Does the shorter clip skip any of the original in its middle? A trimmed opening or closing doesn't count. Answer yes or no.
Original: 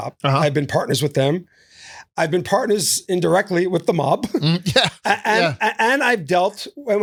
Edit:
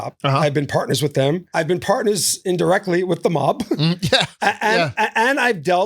yes